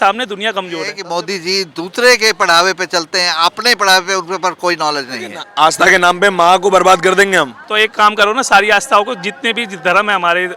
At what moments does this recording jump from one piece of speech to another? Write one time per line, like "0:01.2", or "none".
0:01.0
0:05.4